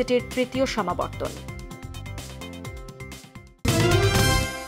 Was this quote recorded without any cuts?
no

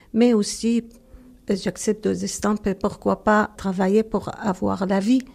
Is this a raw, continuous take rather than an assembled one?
no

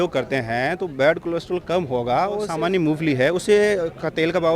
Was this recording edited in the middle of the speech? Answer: yes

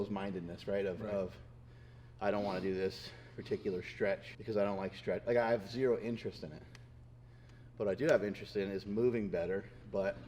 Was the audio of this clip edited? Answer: yes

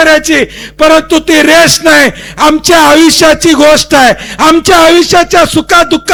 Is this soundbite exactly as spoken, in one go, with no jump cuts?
yes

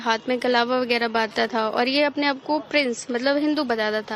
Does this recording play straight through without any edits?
yes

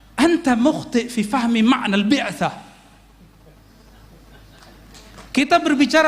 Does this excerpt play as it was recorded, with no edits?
yes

